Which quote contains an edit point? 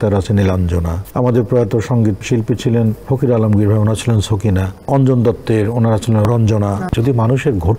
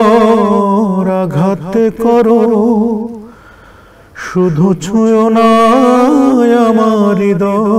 first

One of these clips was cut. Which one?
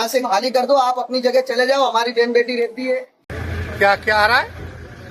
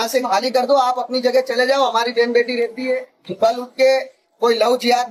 first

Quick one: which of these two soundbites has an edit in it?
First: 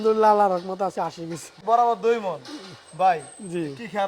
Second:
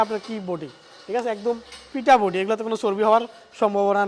first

